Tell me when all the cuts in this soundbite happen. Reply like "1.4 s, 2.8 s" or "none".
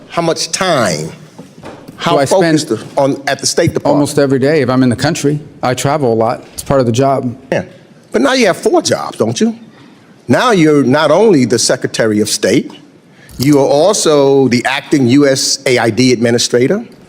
7.5 s